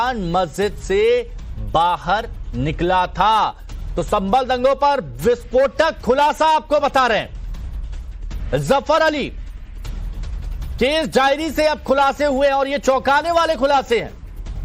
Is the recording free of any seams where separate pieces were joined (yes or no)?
yes